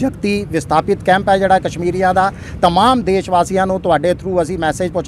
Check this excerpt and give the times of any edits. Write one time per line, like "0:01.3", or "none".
none

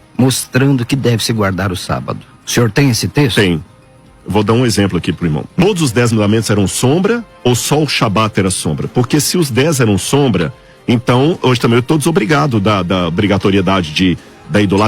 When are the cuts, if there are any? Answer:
0:02.3
0:05.5

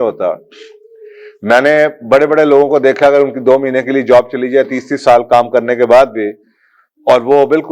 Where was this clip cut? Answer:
none

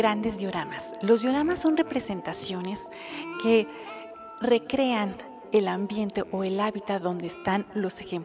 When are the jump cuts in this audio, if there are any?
0:05.9

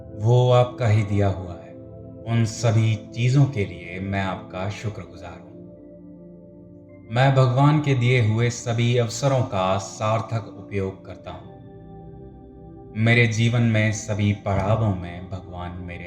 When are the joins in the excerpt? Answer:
0:05.5
0:07.1
0:11.1
0:12.9

